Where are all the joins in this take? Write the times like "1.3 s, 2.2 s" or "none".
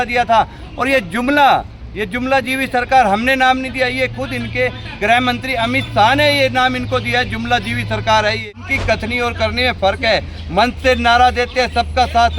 8.5 s